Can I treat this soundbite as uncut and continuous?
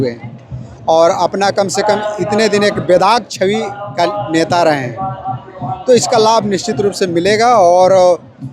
yes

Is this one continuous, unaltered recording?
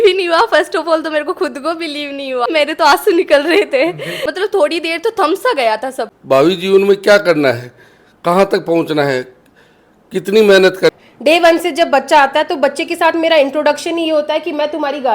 no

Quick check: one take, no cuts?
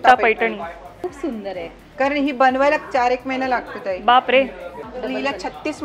no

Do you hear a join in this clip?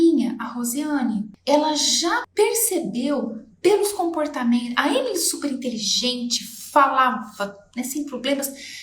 yes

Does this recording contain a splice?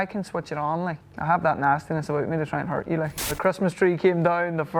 yes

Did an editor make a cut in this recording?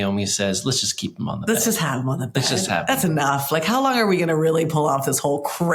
no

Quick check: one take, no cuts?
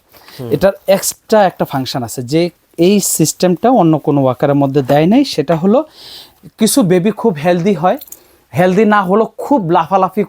yes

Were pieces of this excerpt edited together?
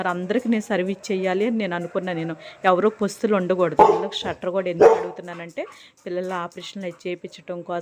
yes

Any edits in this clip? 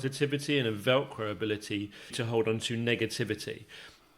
yes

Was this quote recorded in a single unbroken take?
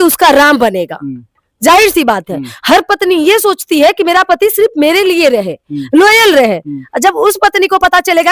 yes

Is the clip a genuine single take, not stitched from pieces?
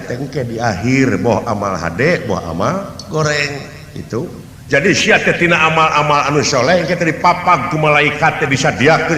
no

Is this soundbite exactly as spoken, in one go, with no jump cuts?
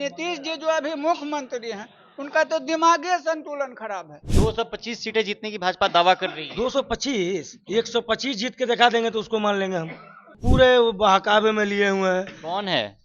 no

